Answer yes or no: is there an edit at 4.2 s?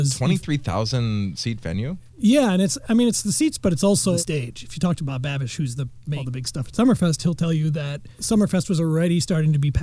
yes